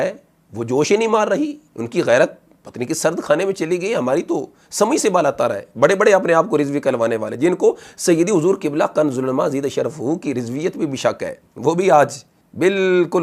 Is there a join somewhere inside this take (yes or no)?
no